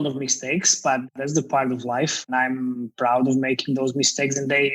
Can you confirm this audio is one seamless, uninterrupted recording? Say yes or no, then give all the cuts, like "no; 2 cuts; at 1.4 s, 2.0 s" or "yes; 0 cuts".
no; 2 cuts; at 1.2 s, 2.2 s